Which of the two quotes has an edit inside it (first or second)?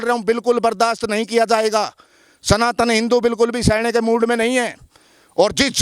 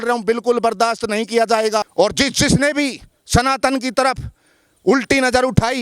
second